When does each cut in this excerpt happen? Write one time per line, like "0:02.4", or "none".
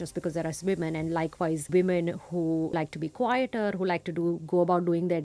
0:01.7
0:02.7